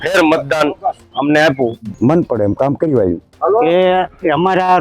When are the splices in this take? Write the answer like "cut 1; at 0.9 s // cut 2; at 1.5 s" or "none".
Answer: cut 1; at 1.8 s // cut 2; at 3.3 s